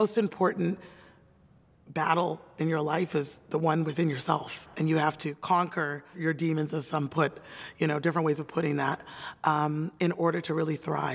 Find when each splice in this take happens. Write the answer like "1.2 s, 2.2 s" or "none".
4.6 s, 6.2 s